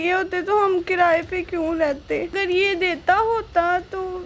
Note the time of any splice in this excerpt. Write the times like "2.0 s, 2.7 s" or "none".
2.4 s